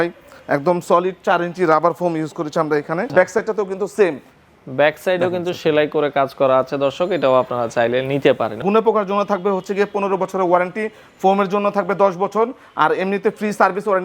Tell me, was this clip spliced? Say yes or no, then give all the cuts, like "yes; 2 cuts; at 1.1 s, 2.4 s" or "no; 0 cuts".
yes; 2 cuts; at 3.1 s, 8.6 s